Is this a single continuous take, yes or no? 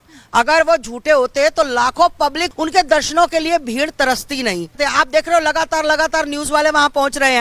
no